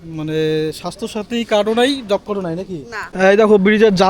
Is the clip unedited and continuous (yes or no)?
no